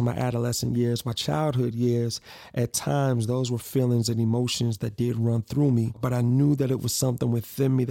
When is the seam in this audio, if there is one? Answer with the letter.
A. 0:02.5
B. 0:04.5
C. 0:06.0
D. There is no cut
C